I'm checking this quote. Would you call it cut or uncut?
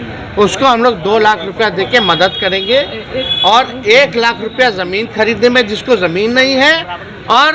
uncut